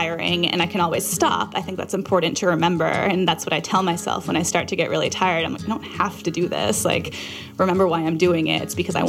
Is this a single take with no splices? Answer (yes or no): yes